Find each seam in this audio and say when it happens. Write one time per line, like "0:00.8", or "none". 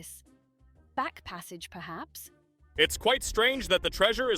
0:02.6